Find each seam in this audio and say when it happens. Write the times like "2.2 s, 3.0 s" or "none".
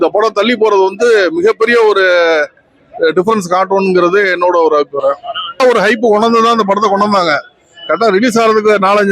5.6 s